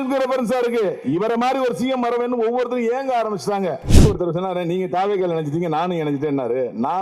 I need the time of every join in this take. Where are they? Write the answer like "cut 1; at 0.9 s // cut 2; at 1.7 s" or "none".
cut 1; at 4.0 s